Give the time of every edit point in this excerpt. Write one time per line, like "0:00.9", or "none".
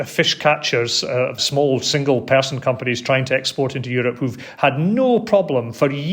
none